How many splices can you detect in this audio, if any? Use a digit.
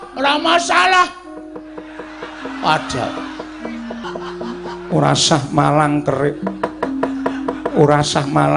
1